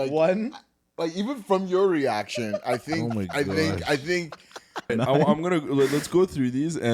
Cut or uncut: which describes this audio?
cut